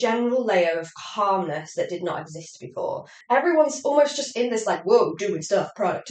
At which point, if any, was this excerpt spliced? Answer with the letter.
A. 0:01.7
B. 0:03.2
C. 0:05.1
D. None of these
B